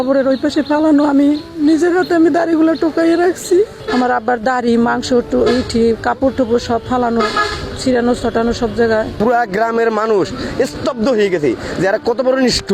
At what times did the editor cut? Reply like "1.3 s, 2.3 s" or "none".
3.8 s, 9.1 s